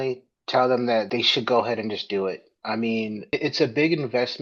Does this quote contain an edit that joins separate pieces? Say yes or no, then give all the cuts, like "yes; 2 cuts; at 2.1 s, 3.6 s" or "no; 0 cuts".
yes; 2 cuts; at 1.1 s, 3.3 s